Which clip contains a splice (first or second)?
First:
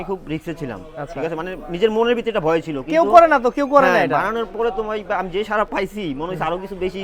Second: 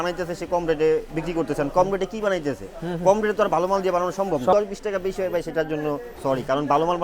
second